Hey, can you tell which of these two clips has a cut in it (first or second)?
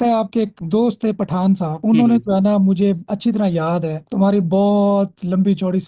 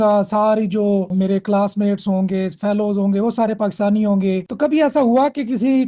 second